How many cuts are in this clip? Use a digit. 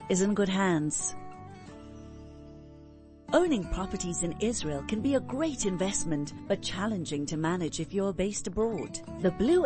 2